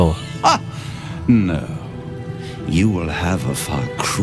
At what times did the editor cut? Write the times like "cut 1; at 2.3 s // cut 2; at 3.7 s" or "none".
none